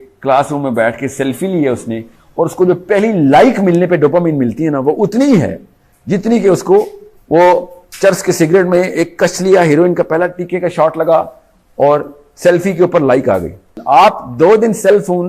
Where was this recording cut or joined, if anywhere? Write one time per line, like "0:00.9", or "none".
0:13.7